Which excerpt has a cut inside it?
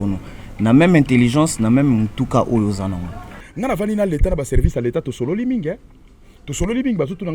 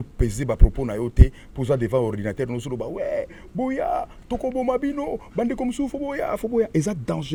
first; 1 cut; at 3.4 s

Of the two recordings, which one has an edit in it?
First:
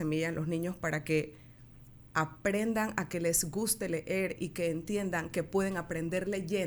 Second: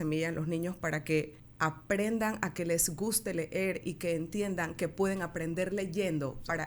second; 1 cut; at 1.4 s

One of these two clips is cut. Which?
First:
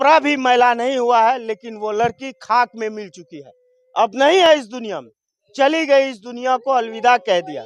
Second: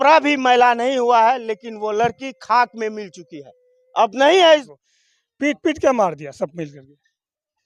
second; 1 cut; at 4.5 s

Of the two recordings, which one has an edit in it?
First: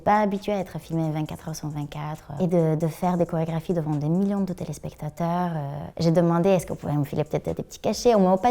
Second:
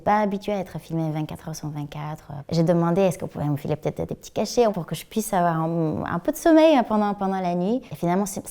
second; 2 cuts; at 2.3 s, 4.7 s

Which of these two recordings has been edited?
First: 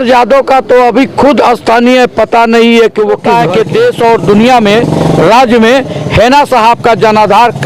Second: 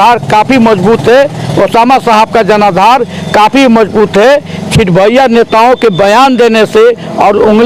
first; 1 cut; at 3.2 s

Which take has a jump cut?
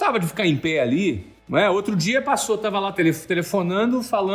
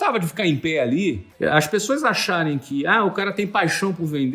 second; 1 cut; at 1.3 s

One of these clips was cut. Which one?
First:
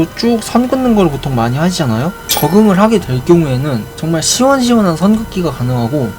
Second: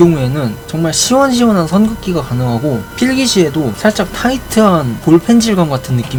first; 1 cut; at 2.2 s

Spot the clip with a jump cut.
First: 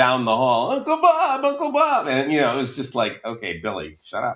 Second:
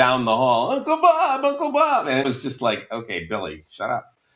second; 1 cut; at 2.2 s

